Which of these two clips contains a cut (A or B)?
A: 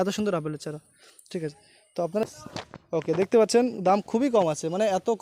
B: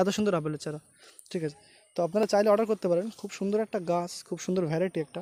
A